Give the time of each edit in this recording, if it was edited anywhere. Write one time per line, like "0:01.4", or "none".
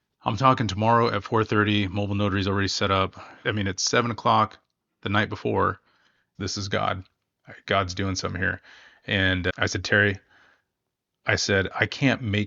0:03.3
0:06.3